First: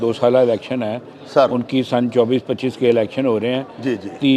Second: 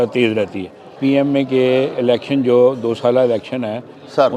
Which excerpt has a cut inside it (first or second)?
second